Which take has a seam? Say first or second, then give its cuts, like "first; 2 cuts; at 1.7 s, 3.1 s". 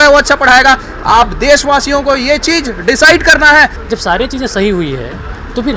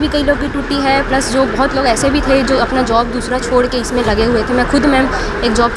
first; 1 cut; at 3.8 s